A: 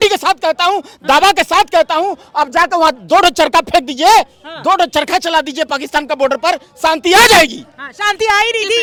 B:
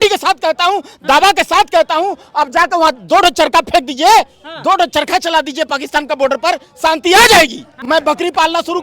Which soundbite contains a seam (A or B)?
B